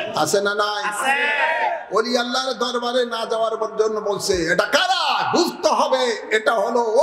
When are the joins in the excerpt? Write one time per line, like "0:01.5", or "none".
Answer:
none